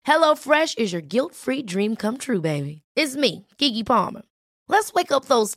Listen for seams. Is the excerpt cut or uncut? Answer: uncut